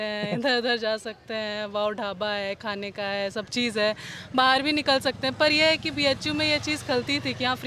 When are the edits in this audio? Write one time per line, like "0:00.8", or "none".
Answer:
none